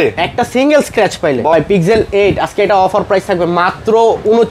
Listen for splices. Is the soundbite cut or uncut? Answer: cut